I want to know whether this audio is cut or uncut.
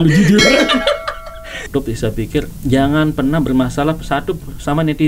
cut